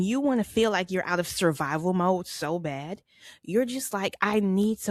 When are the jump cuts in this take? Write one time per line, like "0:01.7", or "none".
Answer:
none